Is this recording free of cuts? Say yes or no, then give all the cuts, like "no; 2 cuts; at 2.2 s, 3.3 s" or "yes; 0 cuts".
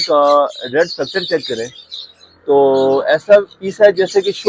yes; 0 cuts